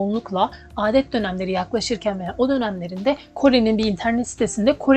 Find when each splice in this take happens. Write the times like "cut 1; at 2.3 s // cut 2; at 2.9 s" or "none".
cut 1; at 3.3 s